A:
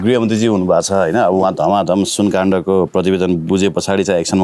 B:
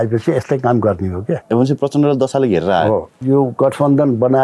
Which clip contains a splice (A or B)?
B